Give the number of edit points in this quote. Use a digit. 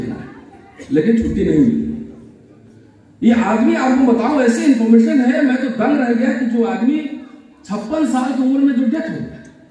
0